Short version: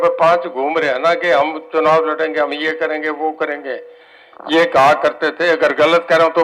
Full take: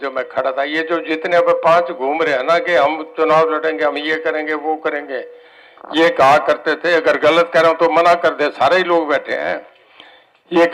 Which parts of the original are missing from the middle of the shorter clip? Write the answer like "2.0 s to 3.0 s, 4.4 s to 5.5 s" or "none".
none